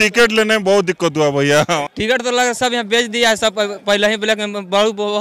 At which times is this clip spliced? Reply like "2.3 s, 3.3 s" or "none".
1.9 s

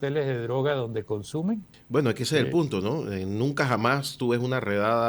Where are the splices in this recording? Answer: 1.7 s

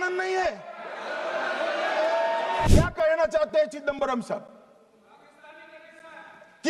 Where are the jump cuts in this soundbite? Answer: 2.7 s

